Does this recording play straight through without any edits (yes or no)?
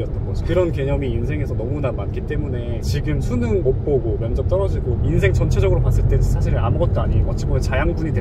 yes